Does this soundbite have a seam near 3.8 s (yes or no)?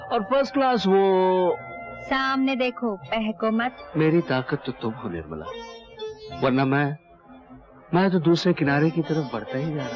yes